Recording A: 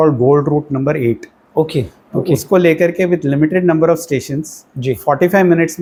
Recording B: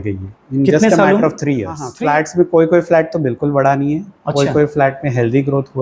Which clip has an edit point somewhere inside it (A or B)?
B